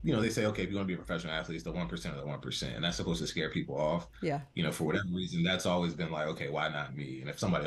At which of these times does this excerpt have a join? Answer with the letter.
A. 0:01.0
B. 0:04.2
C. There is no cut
C